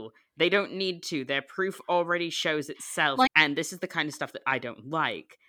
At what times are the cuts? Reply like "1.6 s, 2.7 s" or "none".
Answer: 3.3 s